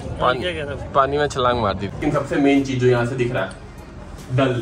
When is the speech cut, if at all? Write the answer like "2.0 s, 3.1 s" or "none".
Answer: 2.0 s